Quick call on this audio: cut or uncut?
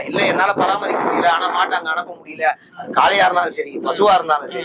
uncut